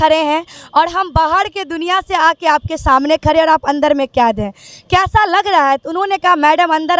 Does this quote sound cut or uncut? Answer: uncut